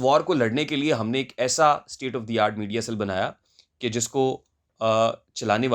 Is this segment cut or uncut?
uncut